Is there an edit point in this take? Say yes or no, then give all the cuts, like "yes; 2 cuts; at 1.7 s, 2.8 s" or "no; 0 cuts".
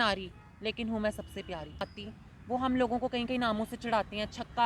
yes; 1 cut; at 1.8 s